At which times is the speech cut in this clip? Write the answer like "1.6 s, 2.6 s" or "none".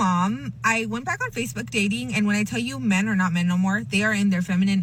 none